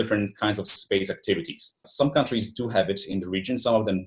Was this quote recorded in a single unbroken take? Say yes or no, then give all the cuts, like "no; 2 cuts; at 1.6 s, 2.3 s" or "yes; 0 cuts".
no; 1 cut; at 1.9 s